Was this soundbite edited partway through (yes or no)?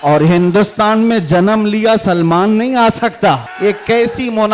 yes